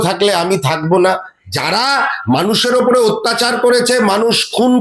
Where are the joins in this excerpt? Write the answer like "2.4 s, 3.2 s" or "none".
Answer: 1.4 s